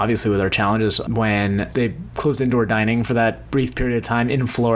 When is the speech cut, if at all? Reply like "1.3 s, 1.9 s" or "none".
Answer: 1.7 s, 3.4 s